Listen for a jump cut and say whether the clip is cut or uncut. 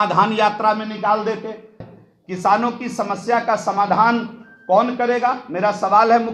cut